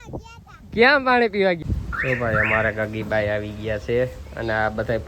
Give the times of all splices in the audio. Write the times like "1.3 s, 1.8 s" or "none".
1.7 s